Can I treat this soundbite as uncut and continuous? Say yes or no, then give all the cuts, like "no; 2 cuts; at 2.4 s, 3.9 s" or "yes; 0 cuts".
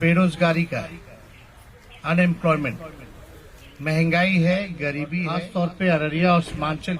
no; 1 cut; at 5.2 s